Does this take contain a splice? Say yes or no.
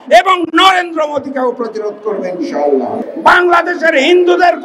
yes